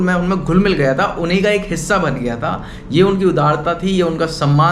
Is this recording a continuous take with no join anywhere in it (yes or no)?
yes